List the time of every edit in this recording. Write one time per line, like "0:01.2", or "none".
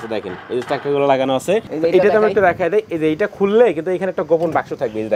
0:01.6